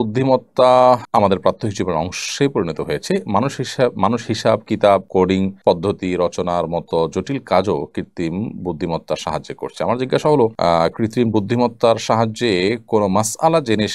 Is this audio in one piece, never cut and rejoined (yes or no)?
no